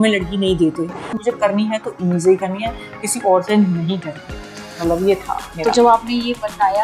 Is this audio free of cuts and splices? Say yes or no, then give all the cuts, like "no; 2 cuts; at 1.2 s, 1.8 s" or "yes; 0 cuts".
no; 1 cut; at 1.1 s